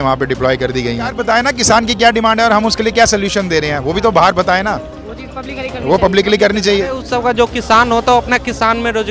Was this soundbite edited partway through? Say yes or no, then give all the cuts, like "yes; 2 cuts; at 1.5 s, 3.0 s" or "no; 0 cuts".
yes; 2 cuts; at 1.2 s, 7.0 s